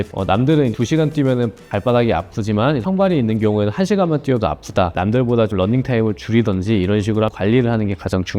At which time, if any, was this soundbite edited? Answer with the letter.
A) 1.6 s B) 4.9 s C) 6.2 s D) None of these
B